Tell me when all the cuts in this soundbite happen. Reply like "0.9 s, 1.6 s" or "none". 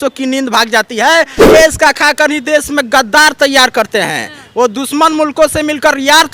1.4 s